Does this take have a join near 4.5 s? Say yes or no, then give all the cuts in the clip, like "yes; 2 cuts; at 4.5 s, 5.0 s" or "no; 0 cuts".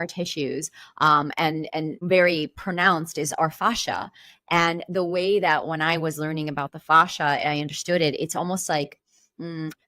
no; 1 cut; at 2.0 s